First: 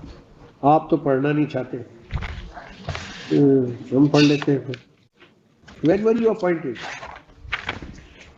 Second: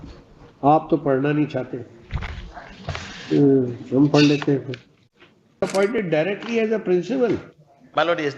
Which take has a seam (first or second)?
second